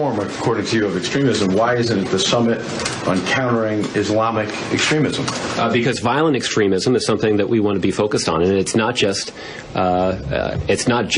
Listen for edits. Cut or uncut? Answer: cut